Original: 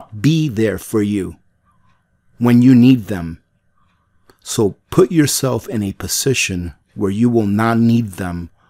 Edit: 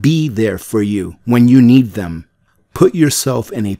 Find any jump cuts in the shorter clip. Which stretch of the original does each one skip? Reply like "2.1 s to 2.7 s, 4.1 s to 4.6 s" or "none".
1.3 s to 2.3 s, 3.8 s to 4.8 s